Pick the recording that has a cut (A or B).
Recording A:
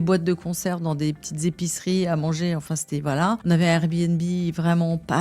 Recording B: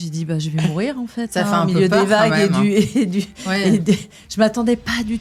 A